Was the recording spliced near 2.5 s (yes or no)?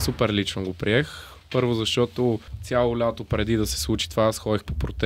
yes